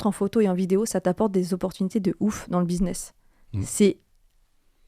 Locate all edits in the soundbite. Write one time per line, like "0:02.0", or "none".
none

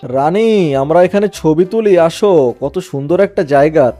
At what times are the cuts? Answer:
none

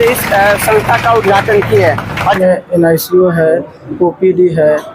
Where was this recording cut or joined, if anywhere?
0:02.4

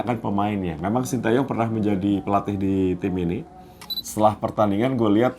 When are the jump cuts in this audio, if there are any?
0:04.0

